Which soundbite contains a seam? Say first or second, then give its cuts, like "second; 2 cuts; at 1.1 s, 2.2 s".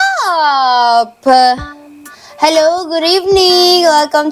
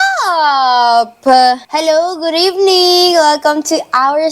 second; 1 cut; at 1.7 s